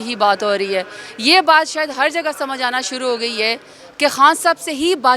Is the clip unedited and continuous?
yes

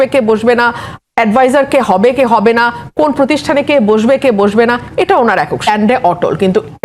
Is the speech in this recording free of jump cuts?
no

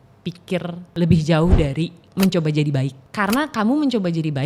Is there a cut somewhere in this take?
yes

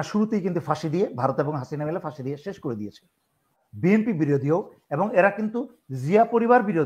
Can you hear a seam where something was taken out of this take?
yes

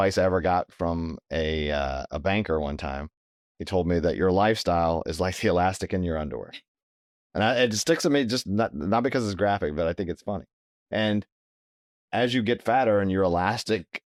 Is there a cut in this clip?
no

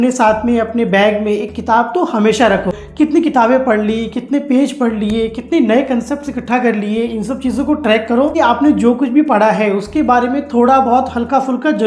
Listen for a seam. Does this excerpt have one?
yes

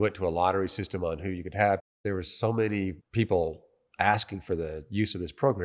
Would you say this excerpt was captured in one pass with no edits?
no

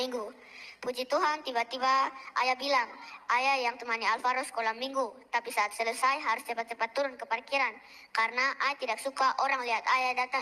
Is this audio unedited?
yes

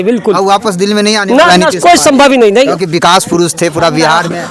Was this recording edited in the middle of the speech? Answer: no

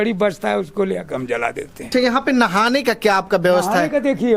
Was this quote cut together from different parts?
yes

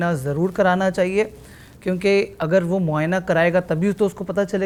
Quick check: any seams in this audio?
no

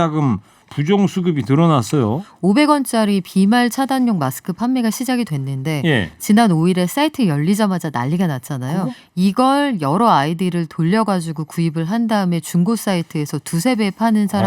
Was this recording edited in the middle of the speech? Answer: yes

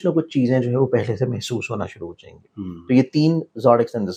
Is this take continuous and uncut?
yes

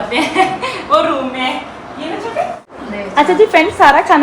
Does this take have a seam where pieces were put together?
yes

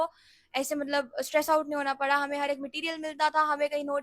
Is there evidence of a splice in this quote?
no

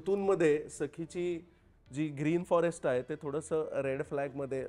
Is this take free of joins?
yes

